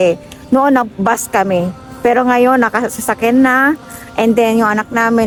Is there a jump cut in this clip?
no; 0 cuts

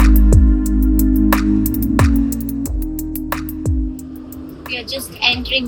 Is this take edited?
yes; 1 cut; at 2.1 s

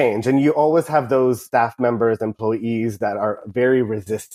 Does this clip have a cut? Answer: yes; 1 cut; at 1.4 s

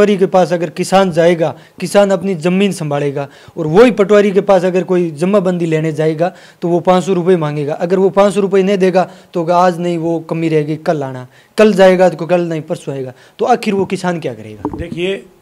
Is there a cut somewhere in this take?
no; 0 cuts

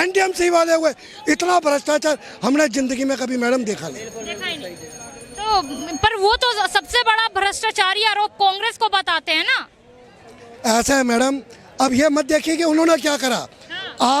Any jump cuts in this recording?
no; 0 cuts

